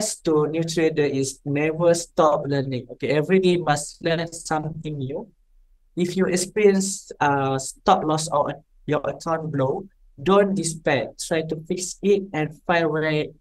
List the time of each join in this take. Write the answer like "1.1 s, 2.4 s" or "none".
none